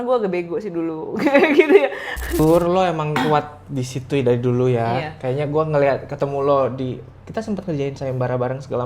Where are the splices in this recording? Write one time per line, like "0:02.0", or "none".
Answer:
0:02.4